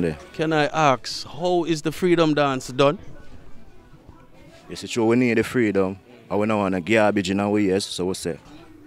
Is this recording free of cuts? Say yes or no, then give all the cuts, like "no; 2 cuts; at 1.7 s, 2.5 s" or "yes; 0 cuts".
yes; 0 cuts